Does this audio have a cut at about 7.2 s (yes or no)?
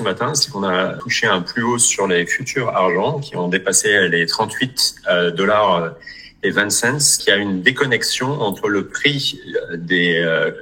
yes